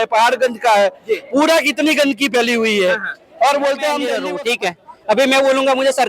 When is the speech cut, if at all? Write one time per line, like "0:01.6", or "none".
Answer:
0:04.2